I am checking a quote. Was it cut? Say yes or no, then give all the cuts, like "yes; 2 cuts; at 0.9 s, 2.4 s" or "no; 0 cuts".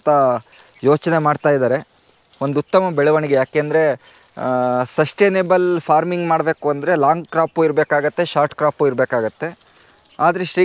no; 0 cuts